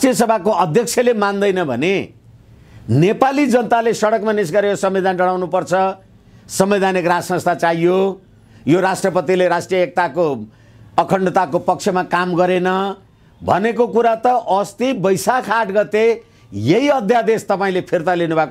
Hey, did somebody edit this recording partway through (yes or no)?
no